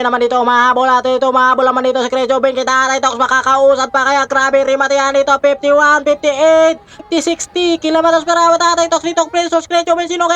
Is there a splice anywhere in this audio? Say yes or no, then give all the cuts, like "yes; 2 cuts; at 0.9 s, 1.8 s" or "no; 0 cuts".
yes; 1 cut; at 7.0 s